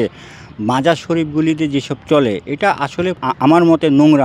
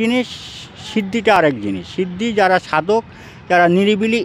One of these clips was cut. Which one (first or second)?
first